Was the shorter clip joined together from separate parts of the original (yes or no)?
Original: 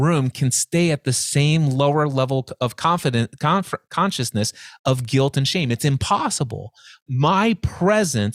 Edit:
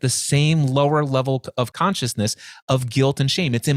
yes